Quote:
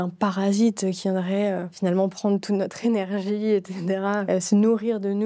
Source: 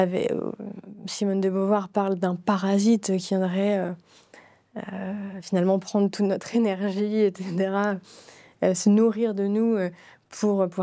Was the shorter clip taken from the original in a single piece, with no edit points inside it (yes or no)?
no